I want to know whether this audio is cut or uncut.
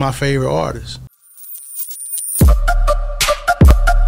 cut